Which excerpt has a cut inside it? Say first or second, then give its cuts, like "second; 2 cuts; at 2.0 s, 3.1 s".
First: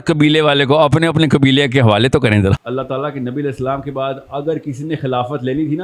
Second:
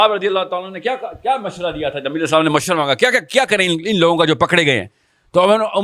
first; 1 cut; at 2.6 s